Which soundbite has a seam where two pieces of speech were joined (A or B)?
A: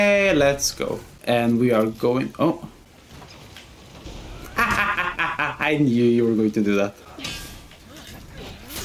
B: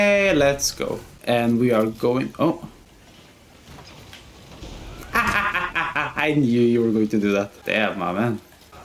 A